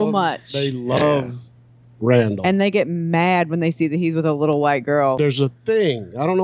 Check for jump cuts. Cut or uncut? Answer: cut